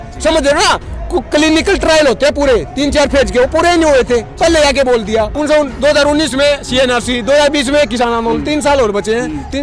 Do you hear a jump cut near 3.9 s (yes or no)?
no